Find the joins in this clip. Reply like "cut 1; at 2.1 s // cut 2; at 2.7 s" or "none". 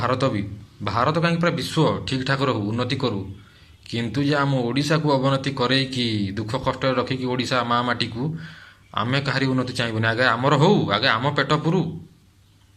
none